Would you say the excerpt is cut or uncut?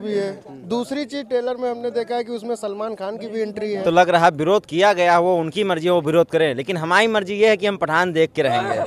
cut